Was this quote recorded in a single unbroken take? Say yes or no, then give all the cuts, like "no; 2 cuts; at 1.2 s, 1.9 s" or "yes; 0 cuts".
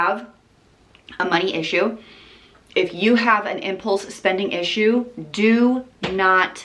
yes; 0 cuts